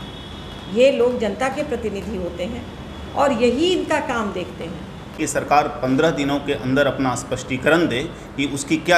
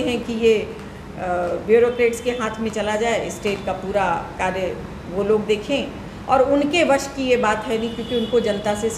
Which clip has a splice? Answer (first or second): first